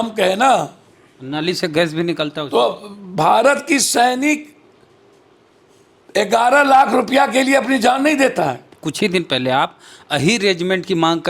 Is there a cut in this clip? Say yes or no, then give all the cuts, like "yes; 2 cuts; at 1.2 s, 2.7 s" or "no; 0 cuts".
yes; 1 cut; at 8.7 s